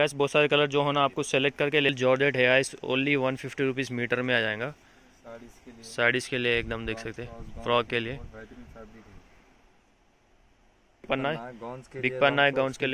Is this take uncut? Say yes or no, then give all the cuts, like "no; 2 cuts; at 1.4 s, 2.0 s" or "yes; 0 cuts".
no; 2 cuts; at 1.9 s, 11.1 s